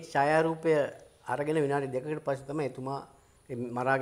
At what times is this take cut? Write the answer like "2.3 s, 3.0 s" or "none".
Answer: none